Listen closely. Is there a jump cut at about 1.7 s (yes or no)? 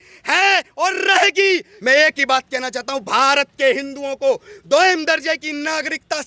yes